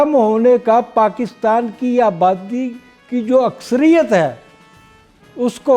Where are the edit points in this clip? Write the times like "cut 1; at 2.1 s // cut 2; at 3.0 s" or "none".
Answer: none